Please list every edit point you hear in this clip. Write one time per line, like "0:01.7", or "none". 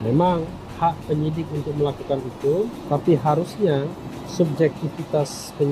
0:02.8